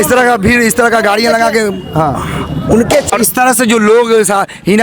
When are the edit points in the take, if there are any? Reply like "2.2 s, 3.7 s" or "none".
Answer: 3.1 s